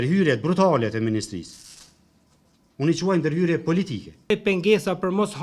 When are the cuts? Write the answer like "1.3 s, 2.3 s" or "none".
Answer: 4.3 s